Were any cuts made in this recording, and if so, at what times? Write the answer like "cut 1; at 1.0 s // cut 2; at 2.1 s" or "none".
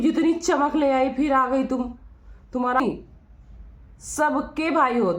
cut 1; at 2.8 s